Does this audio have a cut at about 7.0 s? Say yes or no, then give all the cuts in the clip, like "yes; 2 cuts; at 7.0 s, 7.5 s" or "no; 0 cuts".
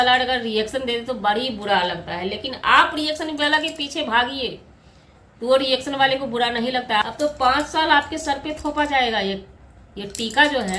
yes; 1 cut; at 7.0 s